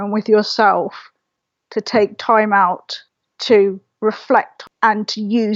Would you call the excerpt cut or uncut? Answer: cut